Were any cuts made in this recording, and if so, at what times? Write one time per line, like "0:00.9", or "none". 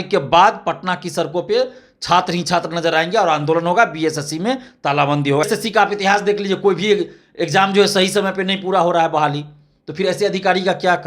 0:05.5